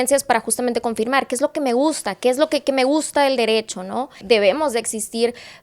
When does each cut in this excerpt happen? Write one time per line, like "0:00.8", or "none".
0:04.2